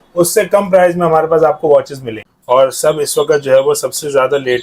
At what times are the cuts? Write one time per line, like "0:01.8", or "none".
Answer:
0:02.3